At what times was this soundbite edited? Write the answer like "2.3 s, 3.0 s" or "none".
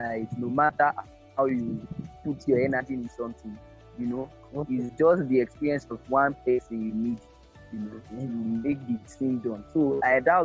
none